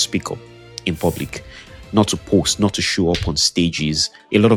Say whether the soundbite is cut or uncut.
uncut